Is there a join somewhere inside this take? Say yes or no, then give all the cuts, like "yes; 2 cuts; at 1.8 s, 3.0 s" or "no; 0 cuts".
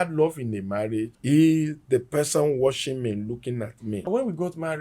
yes; 2 cuts; at 1.1 s, 4.1 s